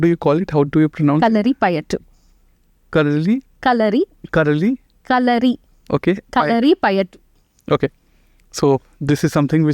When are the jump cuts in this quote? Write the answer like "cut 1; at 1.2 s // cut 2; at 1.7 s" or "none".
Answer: none